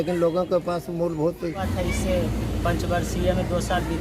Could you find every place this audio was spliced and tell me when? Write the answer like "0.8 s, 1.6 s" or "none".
1.6 s